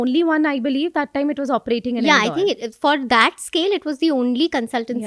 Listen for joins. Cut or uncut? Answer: uncut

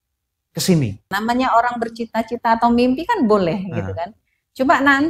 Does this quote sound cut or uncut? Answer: cut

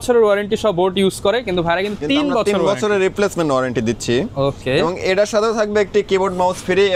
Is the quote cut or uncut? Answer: uncut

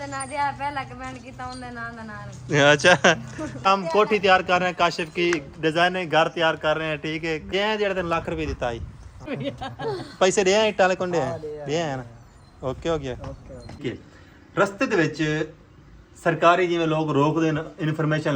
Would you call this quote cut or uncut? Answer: cut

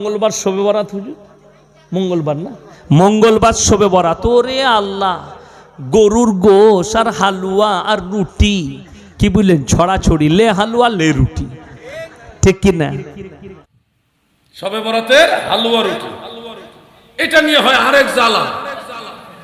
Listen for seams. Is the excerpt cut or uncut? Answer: cut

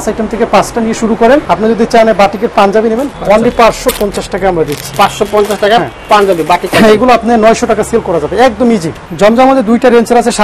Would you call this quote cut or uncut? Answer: cut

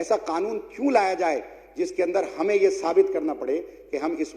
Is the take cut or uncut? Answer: uncut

